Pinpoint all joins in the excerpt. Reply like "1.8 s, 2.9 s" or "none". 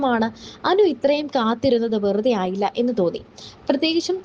3.3 s